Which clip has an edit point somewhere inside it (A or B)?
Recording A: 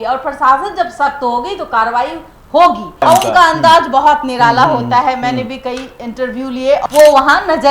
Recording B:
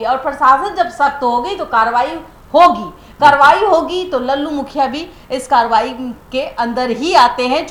A